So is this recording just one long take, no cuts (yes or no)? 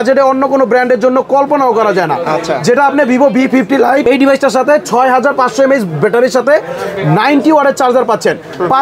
yes